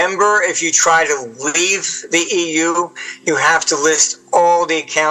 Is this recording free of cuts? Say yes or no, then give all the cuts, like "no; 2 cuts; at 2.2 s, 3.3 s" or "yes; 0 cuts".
yes; 0 cuts